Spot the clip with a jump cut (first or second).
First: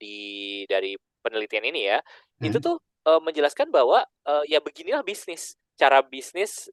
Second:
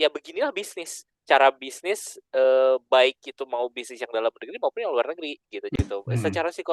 second